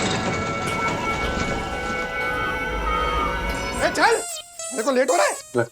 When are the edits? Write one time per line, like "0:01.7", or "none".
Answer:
0:03.7